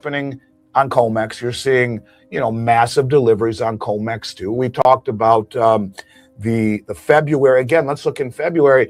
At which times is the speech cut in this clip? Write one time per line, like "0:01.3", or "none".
none